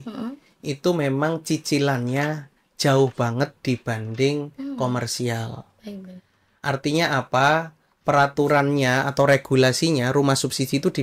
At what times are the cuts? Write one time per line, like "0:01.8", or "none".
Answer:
none